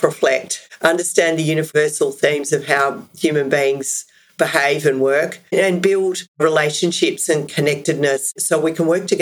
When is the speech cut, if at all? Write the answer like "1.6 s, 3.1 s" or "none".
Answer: 8.3 s